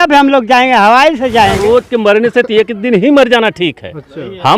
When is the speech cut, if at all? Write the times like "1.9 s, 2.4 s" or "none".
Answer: 1.6 s